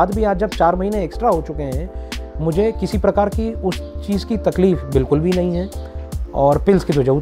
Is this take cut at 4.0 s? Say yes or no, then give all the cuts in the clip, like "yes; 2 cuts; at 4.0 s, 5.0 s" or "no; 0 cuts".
no; 1 cut; at 5.9 s